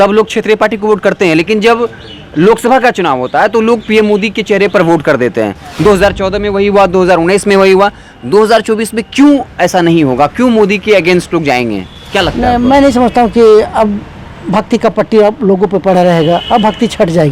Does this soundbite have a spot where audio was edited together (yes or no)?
no